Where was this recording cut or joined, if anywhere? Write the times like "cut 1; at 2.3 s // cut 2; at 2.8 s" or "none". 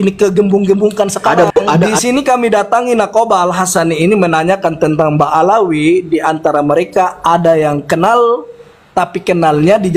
cut 1; at 1.8 s